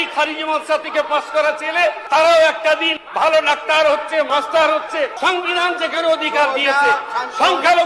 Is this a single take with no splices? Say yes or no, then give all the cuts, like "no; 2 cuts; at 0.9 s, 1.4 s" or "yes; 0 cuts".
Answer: no; 4 cuts; at 2.0 s, 3.0 s, 4.3 s, 5.1 s